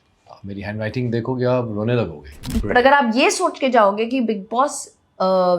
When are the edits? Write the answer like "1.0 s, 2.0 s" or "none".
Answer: 2.5 s